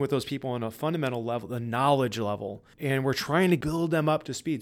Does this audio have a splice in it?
yes; 1 cut; at 3.6 s

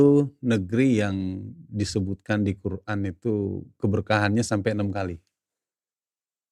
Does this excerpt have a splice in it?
no; 0 cuts

